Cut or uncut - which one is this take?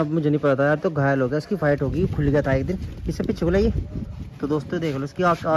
uncut